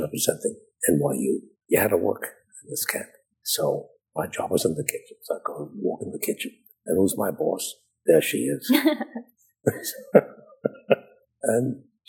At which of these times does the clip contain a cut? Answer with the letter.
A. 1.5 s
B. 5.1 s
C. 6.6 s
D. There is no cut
A